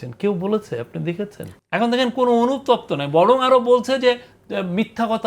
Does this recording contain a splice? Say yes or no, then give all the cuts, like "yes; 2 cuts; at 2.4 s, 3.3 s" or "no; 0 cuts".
yes; 1 cut; at 1.5 s